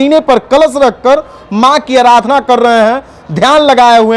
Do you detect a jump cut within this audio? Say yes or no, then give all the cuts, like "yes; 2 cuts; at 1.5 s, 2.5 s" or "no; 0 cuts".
no; 0 cuts